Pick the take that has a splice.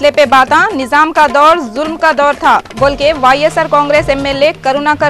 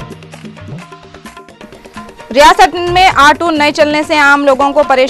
second; 1 cut; at 1.4 s

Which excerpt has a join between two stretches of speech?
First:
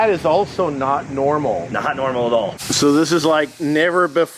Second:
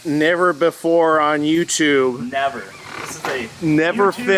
first; 1 cut; at 2.5 s

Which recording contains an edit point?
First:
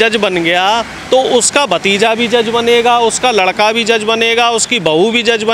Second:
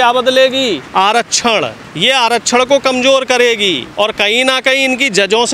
second; 3 cuts; at 0.8 s, 1.8 s, 3.9 s

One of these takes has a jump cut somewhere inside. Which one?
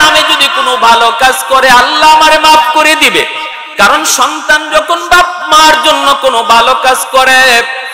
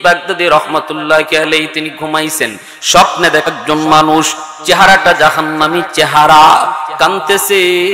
second; 1 cut; at 3.5 s

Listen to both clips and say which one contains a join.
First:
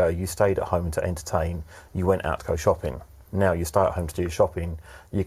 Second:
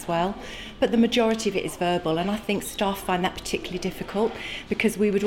second; 1 cut; at 2.4 s

